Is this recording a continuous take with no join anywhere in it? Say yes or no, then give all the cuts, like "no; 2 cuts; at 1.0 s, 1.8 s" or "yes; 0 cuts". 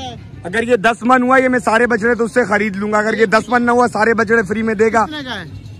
yes; 0 cuts